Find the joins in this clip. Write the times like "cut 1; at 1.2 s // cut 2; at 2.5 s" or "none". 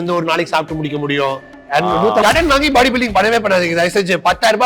cut 1; at 2.2 s